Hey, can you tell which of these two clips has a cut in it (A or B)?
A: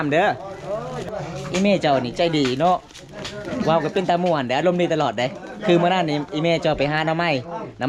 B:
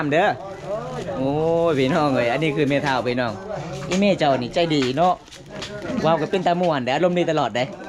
A